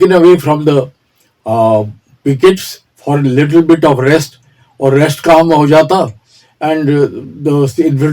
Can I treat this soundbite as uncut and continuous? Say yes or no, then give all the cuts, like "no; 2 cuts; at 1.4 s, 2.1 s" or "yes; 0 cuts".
yes; 0 cuts